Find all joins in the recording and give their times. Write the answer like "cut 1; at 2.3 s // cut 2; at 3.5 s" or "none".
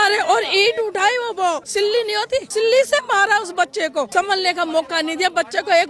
cut 1; at 2.0 s // cut 2; at 4.1 s